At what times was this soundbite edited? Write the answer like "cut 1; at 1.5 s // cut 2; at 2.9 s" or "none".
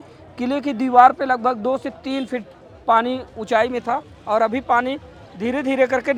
none